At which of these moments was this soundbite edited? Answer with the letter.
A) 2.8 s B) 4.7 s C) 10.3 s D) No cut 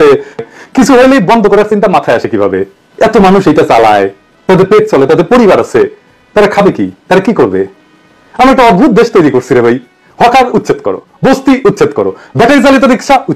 D